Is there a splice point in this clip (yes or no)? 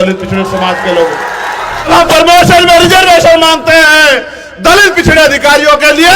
yes